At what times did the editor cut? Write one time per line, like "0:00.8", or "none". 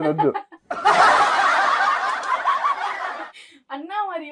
none